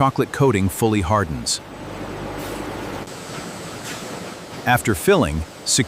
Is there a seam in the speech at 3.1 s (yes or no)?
yes